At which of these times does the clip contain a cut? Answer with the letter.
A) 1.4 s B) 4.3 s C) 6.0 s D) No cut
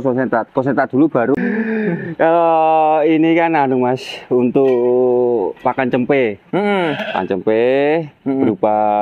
A